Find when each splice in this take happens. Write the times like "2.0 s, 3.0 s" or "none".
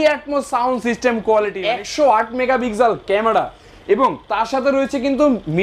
1.6 s